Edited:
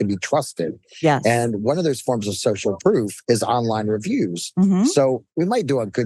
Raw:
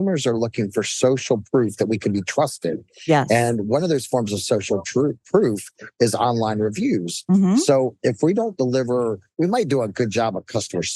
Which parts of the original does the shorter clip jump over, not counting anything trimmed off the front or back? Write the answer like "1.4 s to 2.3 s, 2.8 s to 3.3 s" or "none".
4.9 s to 5.6 s, 8.0 s to 9.3 s